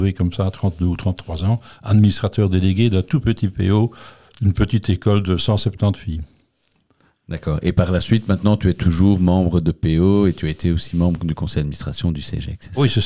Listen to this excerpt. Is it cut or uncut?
uncut